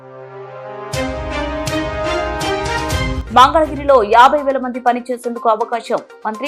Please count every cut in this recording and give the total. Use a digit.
1